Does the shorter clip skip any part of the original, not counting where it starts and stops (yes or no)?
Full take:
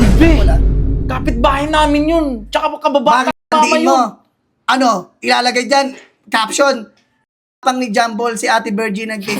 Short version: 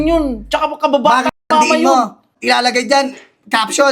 yes